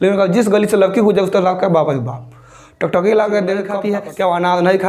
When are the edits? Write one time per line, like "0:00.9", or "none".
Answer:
0:03.8

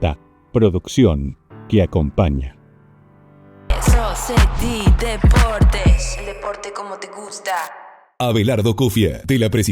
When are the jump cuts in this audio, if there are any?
0:03.8
0:08.1

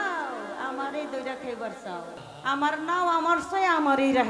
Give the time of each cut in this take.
0:02.3

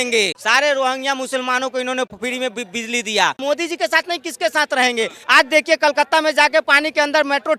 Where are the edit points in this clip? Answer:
0:03.4
0:05.2

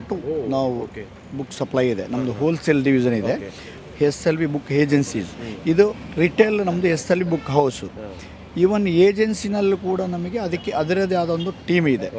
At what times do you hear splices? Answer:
none

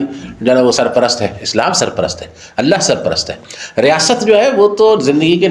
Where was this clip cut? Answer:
none

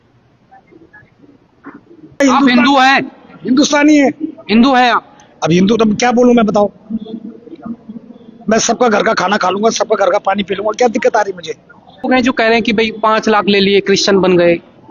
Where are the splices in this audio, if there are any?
0:02.2
0:12.1

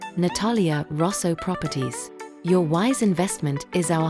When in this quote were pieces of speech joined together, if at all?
none

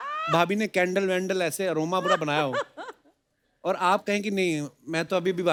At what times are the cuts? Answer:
none

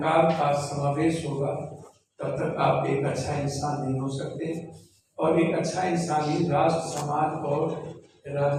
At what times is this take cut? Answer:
none

